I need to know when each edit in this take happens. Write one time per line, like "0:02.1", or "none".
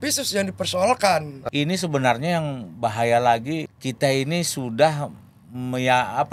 0:01.3
0:03.7